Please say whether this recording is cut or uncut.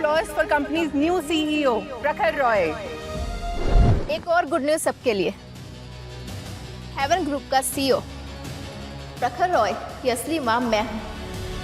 cut